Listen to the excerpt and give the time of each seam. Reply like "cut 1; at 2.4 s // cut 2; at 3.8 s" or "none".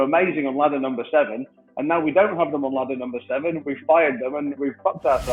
cut 1; at 3.6 s // cut 2; at 4.5 s